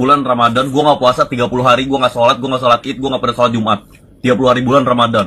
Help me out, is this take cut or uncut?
cut